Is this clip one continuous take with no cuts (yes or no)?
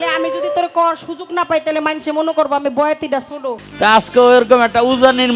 no